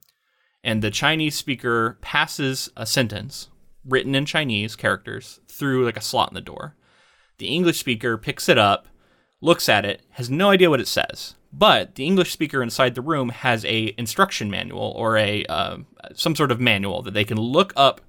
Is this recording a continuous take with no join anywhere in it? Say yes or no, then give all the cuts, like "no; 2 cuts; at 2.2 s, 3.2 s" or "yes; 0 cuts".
no; 1 cut; at 2.7 s